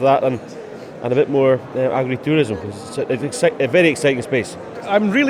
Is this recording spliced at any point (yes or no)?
no